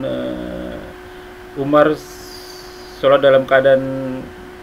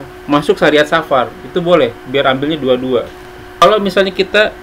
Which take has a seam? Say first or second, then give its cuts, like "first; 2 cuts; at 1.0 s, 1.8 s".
second; 1 cut; at 3.6 s